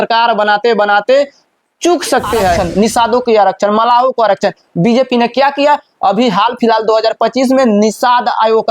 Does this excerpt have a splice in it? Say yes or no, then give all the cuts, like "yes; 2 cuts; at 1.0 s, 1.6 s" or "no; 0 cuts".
yes; 1 cut; at 2.6 s